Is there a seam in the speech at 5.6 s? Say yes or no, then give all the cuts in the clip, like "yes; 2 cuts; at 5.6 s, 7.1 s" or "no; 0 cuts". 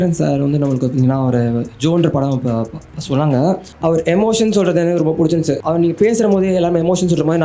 yes; 2 cuts; at 3.7 s, 5.6 s